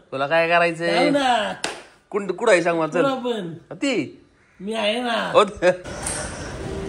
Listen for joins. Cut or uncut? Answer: cut